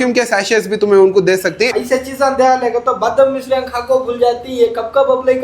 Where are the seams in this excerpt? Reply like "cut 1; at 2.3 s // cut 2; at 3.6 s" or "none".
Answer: cut 1; at 1.7 s